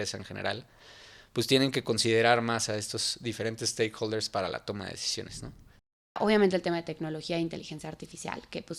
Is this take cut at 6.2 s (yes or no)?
yes